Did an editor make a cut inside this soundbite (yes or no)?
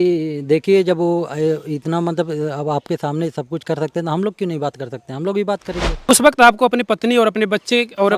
yes